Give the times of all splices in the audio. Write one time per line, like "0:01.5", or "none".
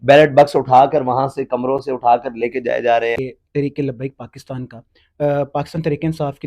0:03.2